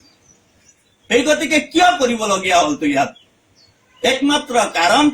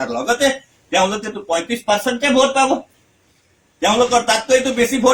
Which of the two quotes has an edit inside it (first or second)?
first